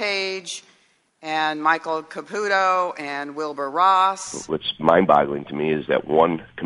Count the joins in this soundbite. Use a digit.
1